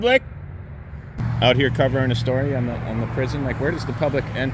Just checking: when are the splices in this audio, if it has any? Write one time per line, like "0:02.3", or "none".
0:01.2